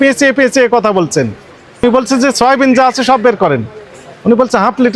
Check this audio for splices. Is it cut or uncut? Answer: cut